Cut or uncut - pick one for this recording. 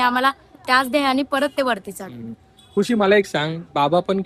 uncut